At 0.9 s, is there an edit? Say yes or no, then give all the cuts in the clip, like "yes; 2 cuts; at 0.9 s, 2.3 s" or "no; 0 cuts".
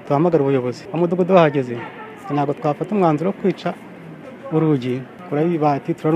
yes; 2 cuts; at 0.9 s, 5.1 s